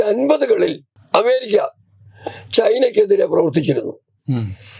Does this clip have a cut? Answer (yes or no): yes